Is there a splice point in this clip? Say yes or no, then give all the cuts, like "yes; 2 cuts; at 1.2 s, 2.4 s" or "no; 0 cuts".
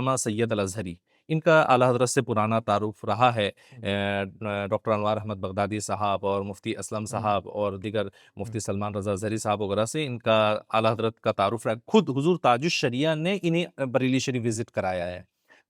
no; 0 cuts